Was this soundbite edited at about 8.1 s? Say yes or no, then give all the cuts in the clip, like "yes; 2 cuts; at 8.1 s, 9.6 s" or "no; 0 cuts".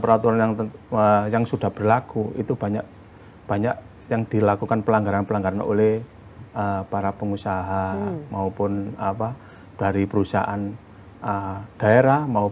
no; 0 cuts